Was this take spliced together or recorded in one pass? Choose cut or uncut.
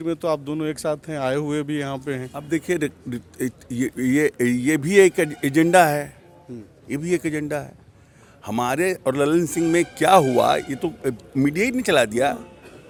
uncut